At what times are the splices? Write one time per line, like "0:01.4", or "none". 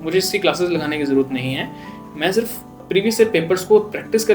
0:02.8